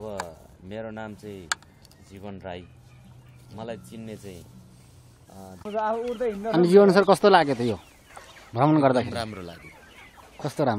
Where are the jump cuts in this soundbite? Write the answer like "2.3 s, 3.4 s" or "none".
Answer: 5.7 s